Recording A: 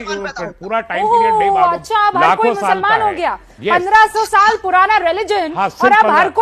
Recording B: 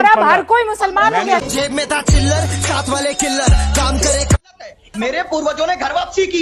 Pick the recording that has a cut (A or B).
B